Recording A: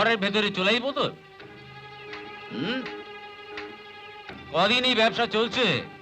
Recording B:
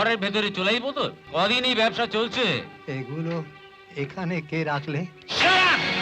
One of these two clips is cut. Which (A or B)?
B